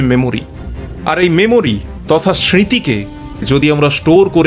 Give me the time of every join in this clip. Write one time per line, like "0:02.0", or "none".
none